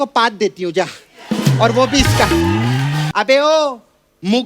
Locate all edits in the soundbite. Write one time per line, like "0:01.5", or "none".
0:03.1